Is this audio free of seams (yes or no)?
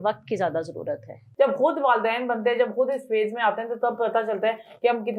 no